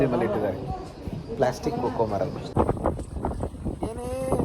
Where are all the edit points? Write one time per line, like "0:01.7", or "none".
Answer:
0:02.5

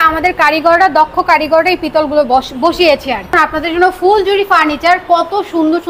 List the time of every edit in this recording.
0:03.4

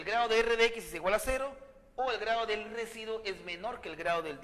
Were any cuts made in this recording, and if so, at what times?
0:01.6

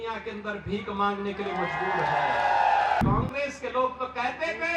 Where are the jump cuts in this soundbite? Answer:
0:03.0

